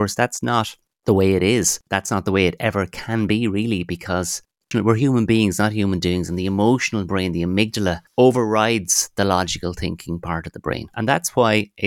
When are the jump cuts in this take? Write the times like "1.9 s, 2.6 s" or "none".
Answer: 1.8 s, 4.7 s, 8.0 s, 10.9 s